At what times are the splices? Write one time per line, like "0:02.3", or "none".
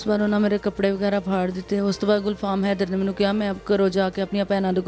none